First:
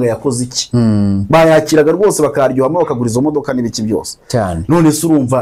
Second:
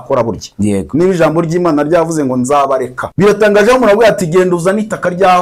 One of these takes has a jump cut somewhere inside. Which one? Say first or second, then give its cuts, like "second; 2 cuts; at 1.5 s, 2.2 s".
second; 1 cut; at 3.0 s